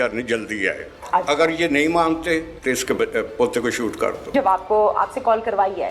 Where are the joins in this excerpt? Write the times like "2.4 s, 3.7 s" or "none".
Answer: 0.9 s, 2.5 s, 4.3 s